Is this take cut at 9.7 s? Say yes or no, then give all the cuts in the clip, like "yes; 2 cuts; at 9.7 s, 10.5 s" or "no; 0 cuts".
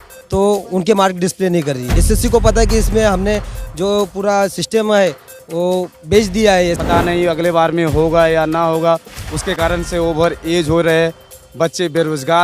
no; 2 cuts; at 2.0 s, 6.8 s